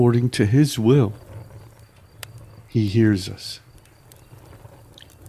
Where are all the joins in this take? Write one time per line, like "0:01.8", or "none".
0:01.2
0:02.7
0:03.4